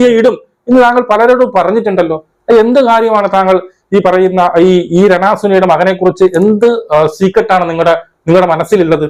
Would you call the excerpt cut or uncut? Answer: uncut